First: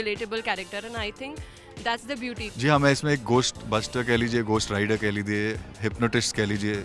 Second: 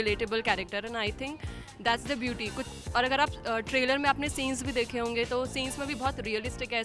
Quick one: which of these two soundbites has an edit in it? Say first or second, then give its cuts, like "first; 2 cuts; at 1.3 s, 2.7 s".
first; 2 cuts; at 2.5 s, 5.6 s